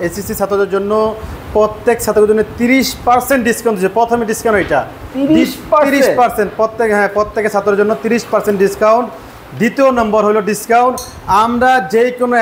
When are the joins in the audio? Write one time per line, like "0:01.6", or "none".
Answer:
none